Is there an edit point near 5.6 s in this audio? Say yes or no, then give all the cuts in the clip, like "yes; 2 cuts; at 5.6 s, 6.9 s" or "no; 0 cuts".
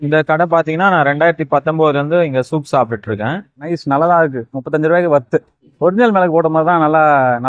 yes; 2 cuts; at 3.6 s, 5.6 s